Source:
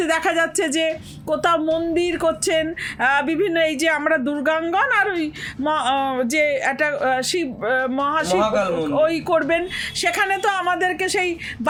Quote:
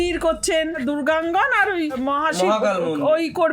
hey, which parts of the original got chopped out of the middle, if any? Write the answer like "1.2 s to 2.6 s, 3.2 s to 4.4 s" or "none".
2.8 s to 4.2 s, 5.3 s to 7.9 s

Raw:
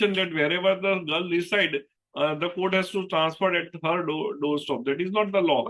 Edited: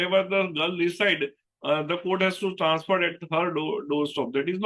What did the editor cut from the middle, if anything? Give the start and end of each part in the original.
none

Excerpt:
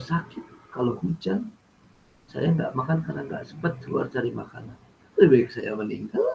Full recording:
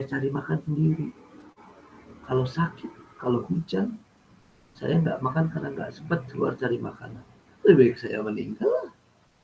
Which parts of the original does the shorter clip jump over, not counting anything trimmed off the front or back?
none

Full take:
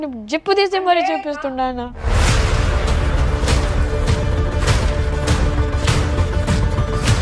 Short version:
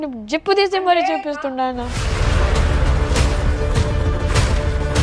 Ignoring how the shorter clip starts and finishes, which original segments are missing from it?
2.0 s to 2.3 s

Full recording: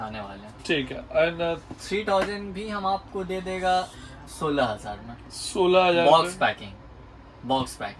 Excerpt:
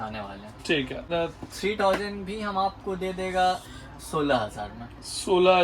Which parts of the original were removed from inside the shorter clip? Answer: 1.1 s to 1.3 s

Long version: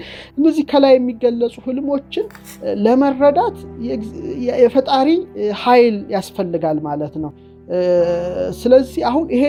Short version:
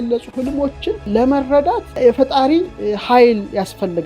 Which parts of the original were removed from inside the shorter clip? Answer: 2.4 s to 2.8 s, 3.6 s to 4.5 s

